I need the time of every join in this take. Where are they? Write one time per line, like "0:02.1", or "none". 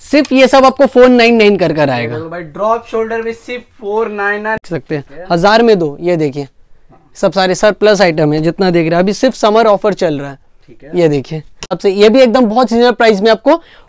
0:04.6
0:11.8